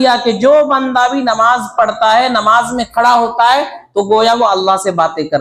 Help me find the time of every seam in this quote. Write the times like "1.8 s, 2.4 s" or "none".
none